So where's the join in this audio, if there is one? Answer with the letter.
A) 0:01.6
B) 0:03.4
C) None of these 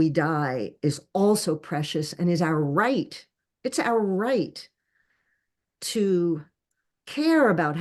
C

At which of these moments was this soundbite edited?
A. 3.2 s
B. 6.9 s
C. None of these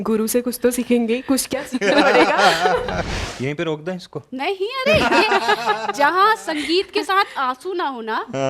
A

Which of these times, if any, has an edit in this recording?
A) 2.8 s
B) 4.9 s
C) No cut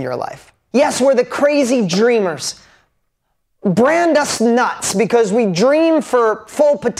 C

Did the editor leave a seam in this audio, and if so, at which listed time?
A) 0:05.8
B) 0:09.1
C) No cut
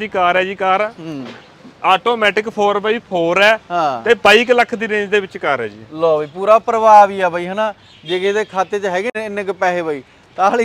B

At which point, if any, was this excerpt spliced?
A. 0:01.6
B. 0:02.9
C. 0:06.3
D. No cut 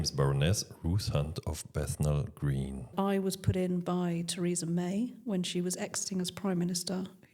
B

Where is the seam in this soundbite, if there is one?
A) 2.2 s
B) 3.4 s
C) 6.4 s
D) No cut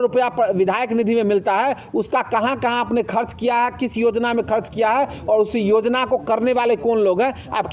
D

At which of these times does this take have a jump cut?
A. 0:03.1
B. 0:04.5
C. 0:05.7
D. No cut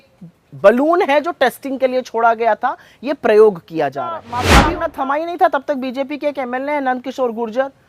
B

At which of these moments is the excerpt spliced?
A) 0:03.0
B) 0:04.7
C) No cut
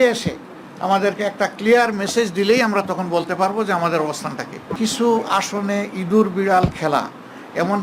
B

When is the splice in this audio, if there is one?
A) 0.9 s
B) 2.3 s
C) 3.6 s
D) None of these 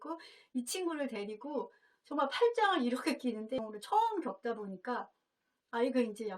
C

